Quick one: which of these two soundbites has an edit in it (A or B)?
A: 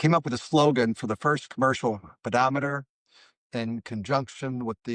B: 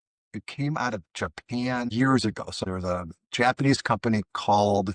B